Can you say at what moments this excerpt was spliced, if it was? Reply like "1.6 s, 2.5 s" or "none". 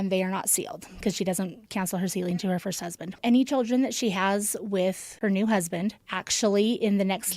5.1 s